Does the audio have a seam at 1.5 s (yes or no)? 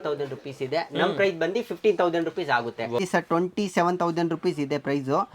no